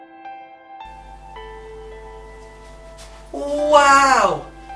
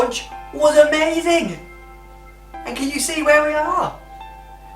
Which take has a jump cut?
first; 1 cut; at 1.0 s

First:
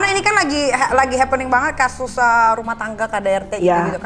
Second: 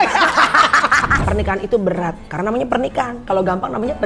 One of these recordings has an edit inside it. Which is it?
second; 1 cut; at 1.1 s

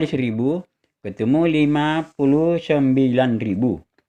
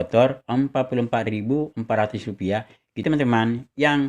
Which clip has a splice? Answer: second; 1 cut; at 3.0 s

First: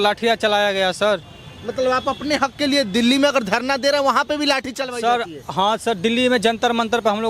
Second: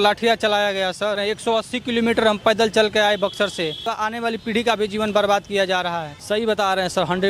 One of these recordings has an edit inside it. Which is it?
second; 3 cuts; at 1.2 s, 3.9 s, 6.1 s

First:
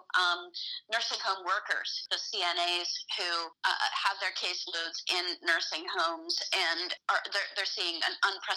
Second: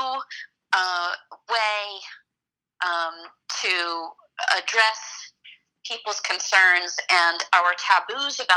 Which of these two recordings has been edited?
first; 3 cuts; at 2.0 s, 3.5 s, 6.9 s

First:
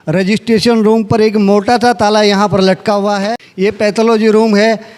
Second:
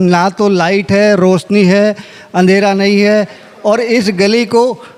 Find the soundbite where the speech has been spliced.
first; 1 cut; at 3.4 s

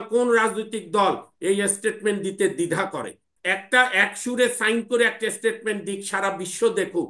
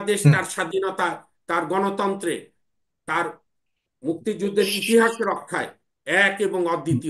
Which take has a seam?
first; 1 cut; at 3.3 s

